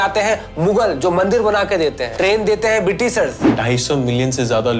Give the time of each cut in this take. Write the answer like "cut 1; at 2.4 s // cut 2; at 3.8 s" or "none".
cut 1; at 2.1 s // cut 2; at 3.5 s